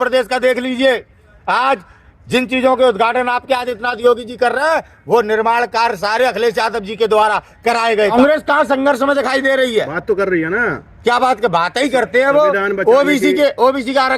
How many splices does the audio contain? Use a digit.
1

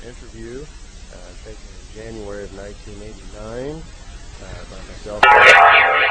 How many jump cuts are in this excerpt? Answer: 1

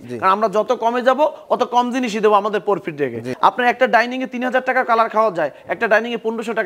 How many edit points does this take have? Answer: 1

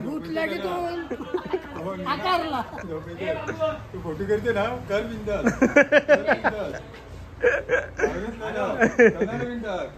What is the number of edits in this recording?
0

